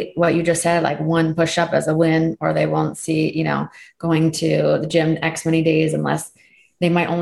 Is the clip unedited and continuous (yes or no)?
yes